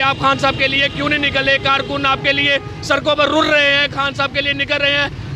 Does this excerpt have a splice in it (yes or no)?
no